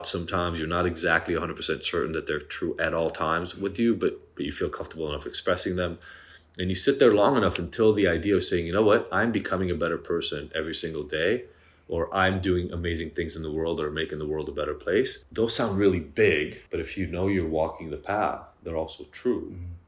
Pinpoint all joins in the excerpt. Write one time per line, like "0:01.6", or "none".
0:15.2
0:16.6